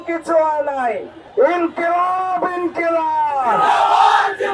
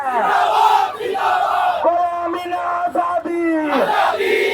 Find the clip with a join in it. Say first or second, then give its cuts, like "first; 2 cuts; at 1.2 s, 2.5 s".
first; 1 cut; at 1.2 s